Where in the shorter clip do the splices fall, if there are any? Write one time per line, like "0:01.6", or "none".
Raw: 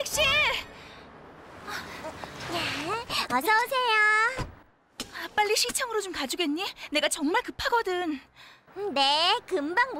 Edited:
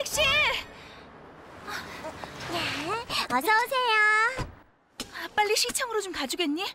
none